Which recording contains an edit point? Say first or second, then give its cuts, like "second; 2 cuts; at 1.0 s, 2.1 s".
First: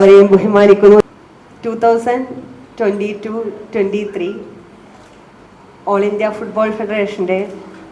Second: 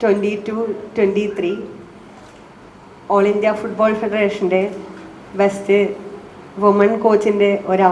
first; 1 cut; at 1.0 s